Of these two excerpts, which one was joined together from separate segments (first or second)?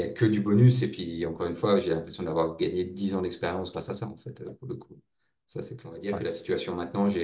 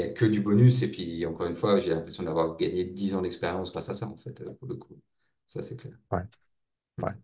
first